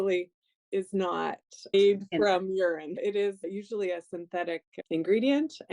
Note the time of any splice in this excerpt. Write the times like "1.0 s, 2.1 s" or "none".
1.7 s